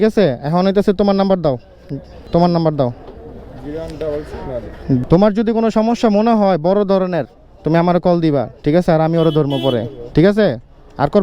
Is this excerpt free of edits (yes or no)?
no